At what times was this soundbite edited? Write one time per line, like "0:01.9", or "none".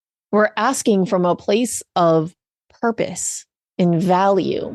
none